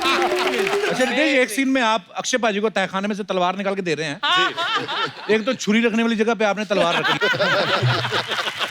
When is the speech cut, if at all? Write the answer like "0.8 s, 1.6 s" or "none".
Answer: 0.9 s